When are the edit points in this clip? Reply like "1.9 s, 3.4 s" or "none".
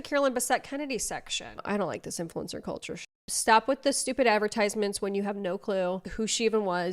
1.6 s, 3.3 s